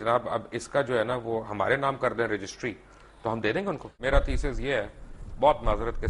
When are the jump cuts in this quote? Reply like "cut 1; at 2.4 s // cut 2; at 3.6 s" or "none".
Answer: cut 1; at 3.9 s